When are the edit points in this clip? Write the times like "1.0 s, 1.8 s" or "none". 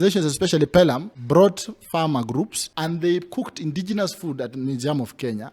1.1 s, 2.6 s